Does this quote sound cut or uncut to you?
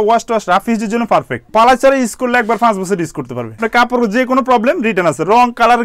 cut